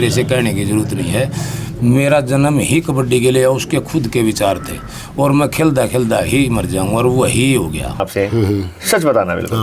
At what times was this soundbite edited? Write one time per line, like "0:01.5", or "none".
0:08.1